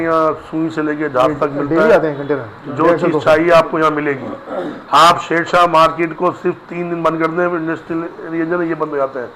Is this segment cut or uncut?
uncut